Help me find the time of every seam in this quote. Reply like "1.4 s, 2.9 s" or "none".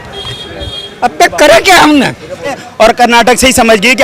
2.6 s

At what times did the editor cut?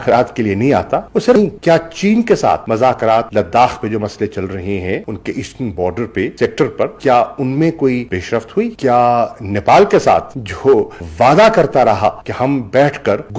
none

